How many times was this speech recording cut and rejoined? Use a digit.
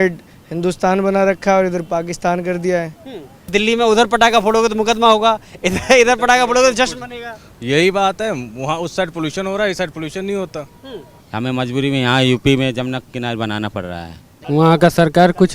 3